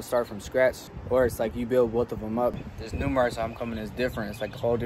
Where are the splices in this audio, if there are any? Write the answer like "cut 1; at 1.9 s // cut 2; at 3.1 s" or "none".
cut 1; at 0.9 s // cut 2; at 2.6 s

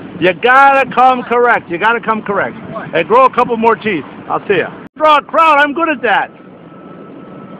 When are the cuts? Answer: cut 1; at 4.8 s

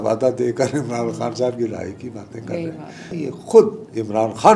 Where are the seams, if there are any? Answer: cut 1; at 3.1 s

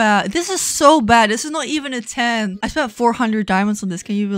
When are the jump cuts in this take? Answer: none

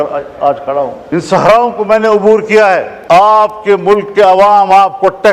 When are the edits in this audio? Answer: cut 1; at 1.0 s // cut 2; at 2.9 s

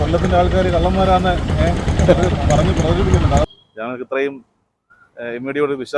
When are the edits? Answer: cut 1; at 3.4 s

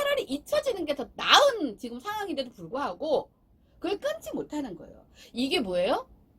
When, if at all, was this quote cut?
none

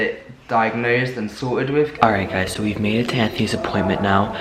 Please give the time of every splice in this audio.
cut 1; at 1.9 s

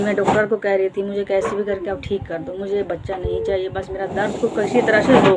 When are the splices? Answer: none

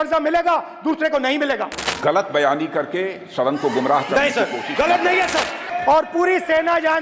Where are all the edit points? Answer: cut 1; at 1.8 s // cut 2; at 5.6 s

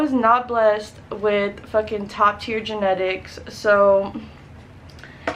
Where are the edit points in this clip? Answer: none

